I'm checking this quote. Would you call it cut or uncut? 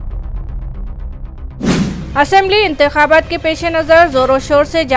cut